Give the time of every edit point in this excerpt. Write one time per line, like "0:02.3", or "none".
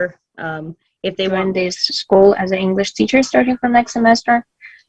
0:01.4